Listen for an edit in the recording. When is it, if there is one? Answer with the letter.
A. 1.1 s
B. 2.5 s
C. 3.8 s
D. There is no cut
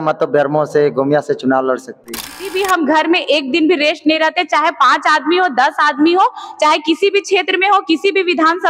B